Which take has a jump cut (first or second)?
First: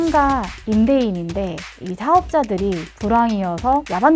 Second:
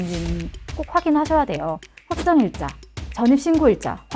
second